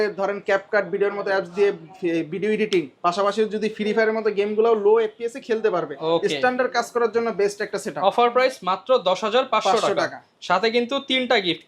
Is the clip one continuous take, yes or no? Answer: yes